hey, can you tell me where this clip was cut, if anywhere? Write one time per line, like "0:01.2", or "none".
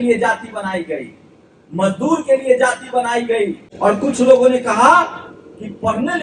0:03.6